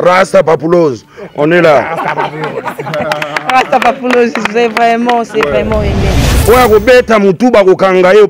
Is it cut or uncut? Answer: cut